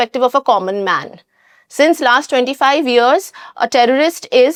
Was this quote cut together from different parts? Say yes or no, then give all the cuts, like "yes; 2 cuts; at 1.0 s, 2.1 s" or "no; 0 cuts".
no; 0 cuts